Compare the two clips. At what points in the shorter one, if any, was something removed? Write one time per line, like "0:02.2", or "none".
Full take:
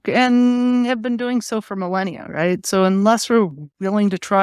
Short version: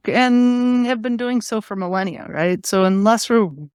none